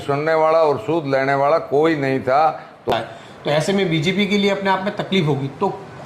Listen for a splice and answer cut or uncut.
cut